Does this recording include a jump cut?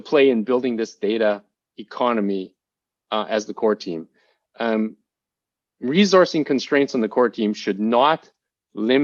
no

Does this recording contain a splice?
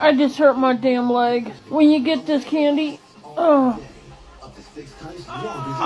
yes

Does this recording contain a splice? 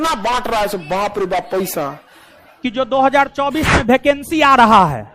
yes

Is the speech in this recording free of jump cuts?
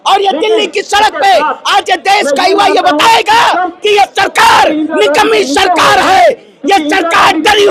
yes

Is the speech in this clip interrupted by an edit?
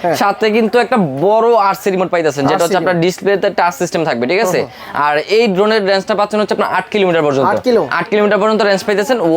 no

